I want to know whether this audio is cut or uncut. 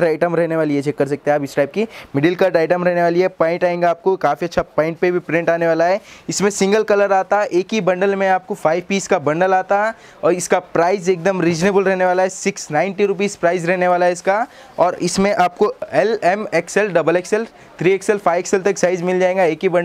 uncut